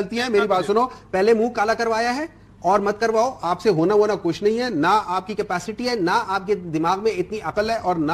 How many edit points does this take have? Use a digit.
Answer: 0